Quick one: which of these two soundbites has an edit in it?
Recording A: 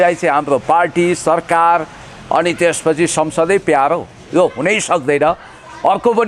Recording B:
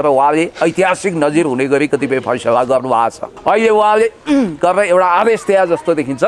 B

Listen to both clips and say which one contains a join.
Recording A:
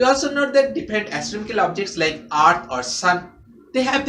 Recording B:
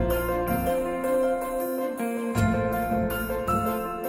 A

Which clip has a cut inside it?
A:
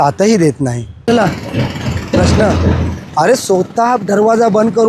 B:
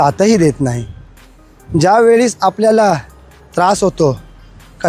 A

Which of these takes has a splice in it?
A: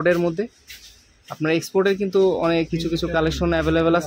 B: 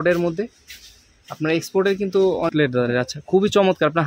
B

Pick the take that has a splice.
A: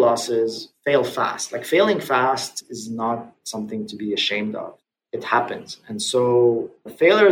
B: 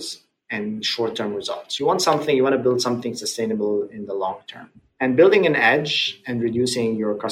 B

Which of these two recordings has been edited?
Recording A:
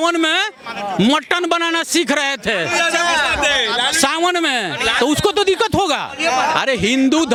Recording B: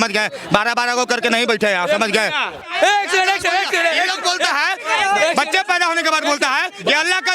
B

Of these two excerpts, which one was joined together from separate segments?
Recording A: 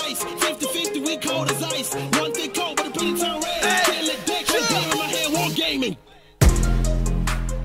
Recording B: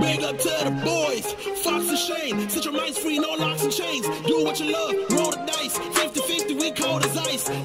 B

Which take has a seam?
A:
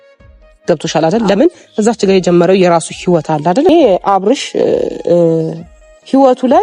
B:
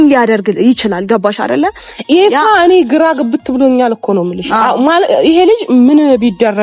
A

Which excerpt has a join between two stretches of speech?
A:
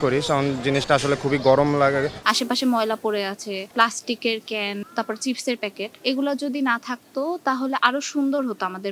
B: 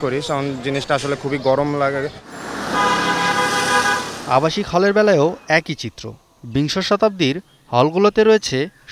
A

